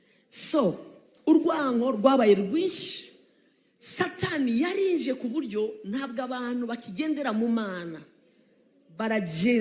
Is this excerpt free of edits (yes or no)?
yes